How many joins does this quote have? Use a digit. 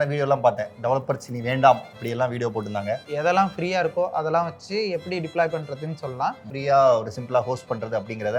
2